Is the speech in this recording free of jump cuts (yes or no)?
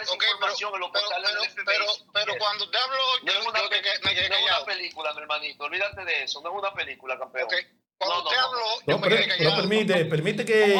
yes